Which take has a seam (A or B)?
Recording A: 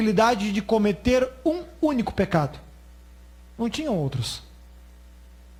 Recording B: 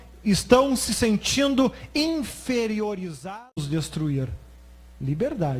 B